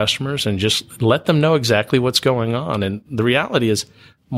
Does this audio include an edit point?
no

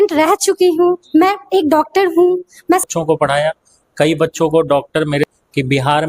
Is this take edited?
yes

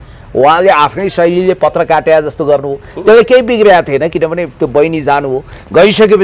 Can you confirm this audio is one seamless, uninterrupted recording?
yes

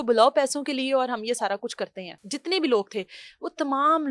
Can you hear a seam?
yes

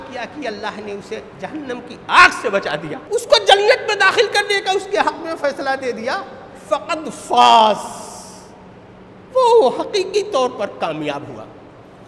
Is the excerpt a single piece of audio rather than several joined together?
no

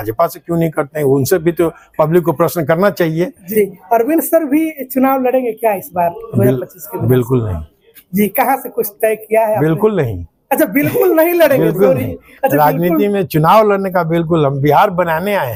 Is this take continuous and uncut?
yes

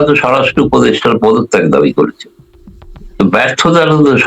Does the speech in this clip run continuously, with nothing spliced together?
yes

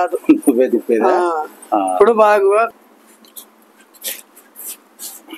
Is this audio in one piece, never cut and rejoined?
no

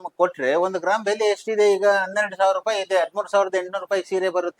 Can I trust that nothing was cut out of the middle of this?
yes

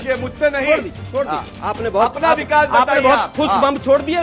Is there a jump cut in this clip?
no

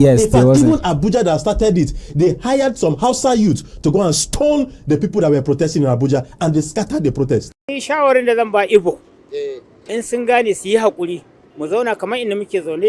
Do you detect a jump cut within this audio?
yes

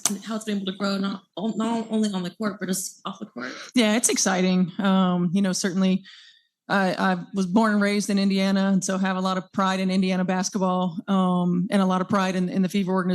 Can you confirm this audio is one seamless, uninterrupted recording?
no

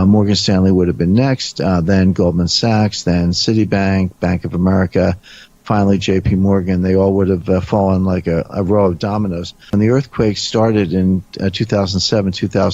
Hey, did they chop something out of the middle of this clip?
yes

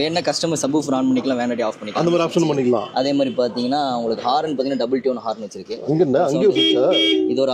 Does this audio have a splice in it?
no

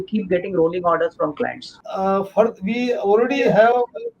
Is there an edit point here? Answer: yes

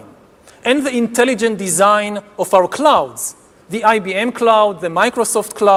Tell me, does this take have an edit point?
no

